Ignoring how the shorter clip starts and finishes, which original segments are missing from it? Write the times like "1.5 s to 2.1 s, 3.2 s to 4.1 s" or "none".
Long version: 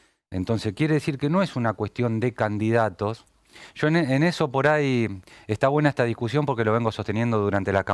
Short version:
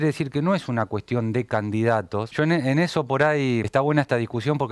3.2 s to 3.7 s, 5.1 s to 5.5 s